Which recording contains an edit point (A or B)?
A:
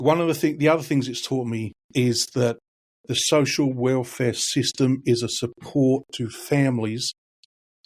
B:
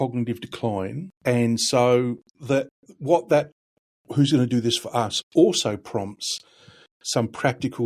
B